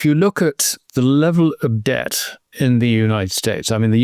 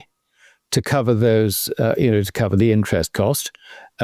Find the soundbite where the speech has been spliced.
first; 1 cut; at 2.4 s

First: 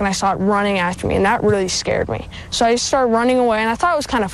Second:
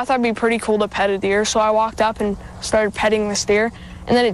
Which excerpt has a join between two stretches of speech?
first; 1 cut; at 1.4 s

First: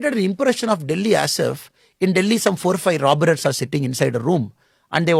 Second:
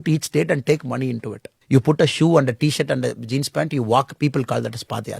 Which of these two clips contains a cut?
second; 1 cut; at 1.5 s

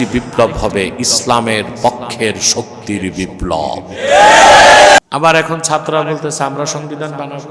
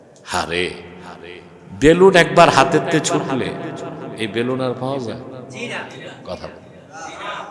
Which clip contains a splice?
first; 1 cut; at 5.0 s

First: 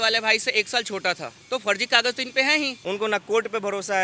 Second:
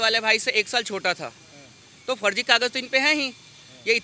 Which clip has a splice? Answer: first; 2 cuts; at 1.3 s, 2.8 s

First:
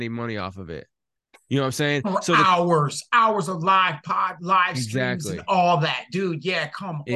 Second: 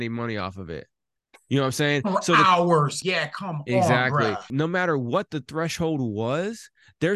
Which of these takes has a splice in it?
second; 2 cuts; at 3.0 s, 4.5 s

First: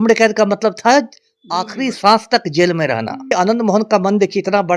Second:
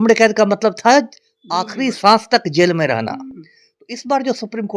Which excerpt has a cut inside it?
first; 1 cut; at 3.3 s

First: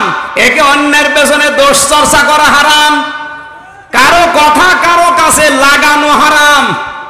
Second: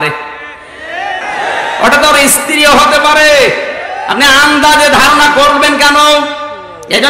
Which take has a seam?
second; 1 cut; at 1.2 s

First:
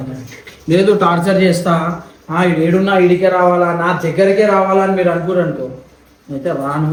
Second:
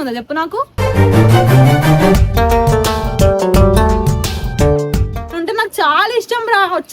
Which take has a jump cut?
second; 1 cut; at 5.2 s

